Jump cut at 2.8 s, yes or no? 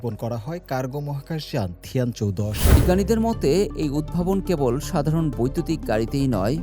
yes